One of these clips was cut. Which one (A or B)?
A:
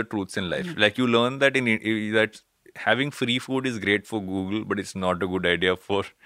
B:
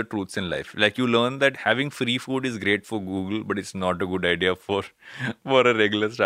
B